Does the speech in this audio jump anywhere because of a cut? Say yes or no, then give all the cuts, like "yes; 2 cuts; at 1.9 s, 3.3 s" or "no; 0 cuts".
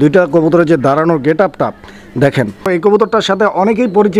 yes; 1 cut; at 2.8 s